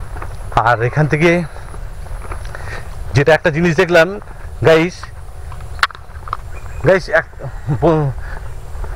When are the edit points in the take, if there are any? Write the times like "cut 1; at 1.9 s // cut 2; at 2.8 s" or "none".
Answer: none